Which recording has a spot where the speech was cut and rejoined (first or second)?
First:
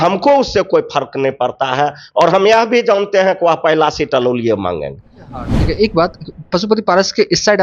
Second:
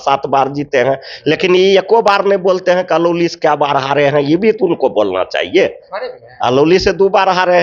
first